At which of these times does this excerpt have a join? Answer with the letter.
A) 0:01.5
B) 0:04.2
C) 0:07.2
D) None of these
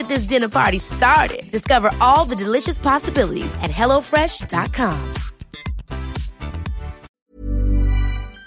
C